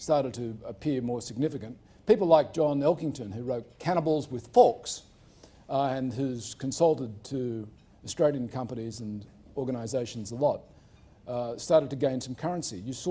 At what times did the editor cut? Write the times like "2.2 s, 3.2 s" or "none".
10.7 s